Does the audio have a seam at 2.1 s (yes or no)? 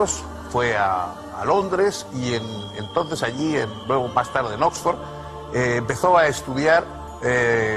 yes